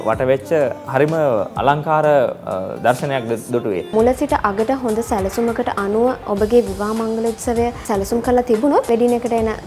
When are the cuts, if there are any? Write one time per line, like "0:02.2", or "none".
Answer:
0:03.9
0:07.8
0:08.8